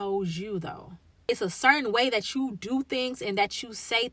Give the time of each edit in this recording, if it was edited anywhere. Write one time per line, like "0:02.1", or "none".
0:01.3